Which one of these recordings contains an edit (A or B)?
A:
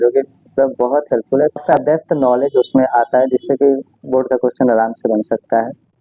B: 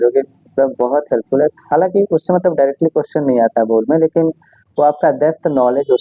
A